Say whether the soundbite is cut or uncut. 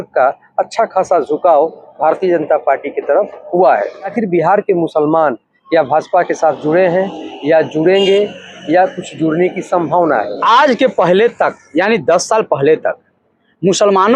cut